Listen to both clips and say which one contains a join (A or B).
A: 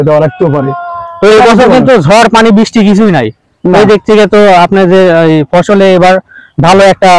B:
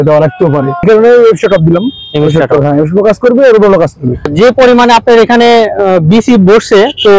B